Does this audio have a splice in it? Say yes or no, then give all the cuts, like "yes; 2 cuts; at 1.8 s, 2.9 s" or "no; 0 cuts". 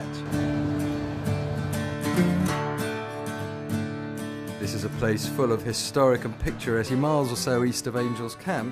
no; 0 cuts